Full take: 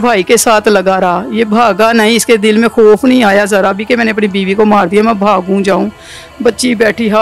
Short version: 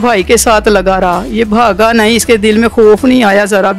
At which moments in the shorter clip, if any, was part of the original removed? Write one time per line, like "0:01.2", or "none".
none

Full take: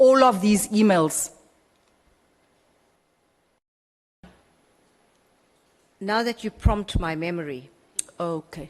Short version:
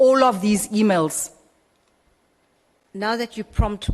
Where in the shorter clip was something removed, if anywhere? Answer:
0:02.8

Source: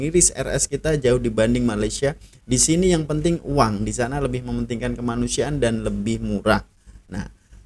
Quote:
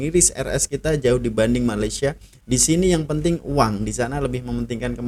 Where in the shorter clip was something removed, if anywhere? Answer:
none

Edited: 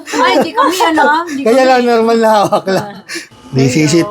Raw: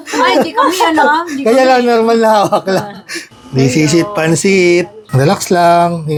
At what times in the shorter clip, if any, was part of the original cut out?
none

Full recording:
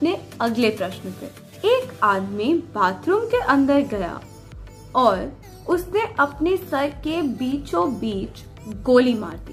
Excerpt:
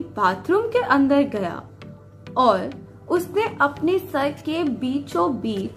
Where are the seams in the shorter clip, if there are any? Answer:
none

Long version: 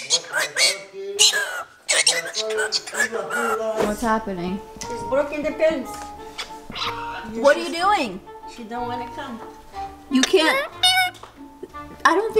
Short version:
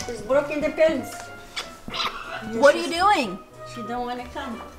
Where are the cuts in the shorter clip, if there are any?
none

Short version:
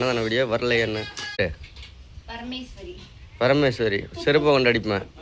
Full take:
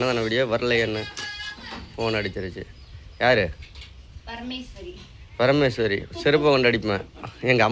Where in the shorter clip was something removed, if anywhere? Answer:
0:01.4

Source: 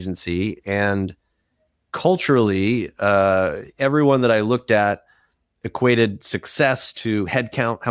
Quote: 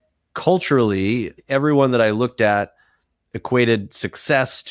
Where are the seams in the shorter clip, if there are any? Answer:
0:01.3

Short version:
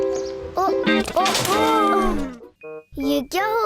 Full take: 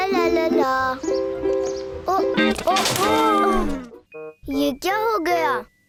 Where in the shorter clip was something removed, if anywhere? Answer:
none

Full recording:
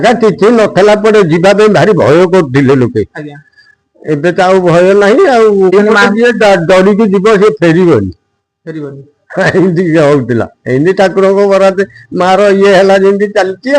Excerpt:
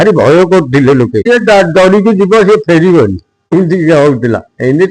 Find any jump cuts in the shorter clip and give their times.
0:01.2
0:03.5

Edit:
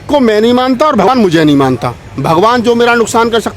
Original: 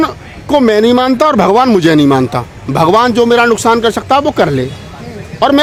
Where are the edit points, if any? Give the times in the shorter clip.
0:01.1

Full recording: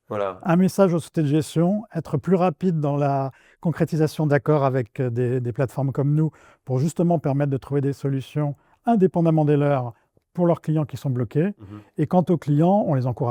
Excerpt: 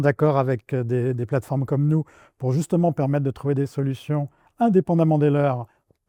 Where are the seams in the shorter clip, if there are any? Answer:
none

